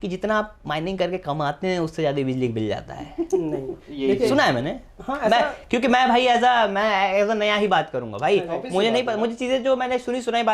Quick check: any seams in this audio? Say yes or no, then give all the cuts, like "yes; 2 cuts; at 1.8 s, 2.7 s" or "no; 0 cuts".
no; 0 cuts